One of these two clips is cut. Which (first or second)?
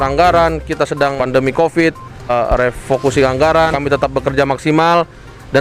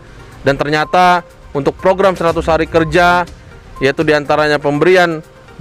first